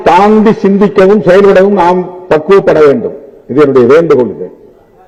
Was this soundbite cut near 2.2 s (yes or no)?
no